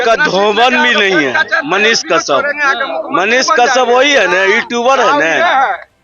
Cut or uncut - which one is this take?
uncut